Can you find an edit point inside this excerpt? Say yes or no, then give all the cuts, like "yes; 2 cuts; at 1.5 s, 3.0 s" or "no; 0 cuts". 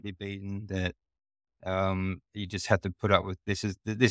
no; 0 cuts